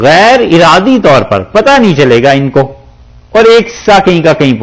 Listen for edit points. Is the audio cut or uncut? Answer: uncut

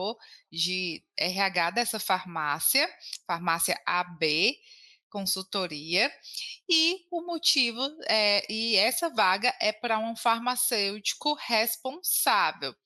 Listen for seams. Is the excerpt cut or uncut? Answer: uncut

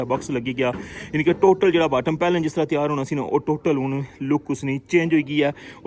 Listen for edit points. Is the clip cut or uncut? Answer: uncut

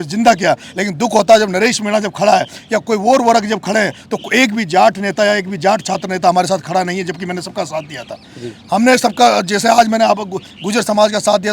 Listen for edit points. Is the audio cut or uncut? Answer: uncut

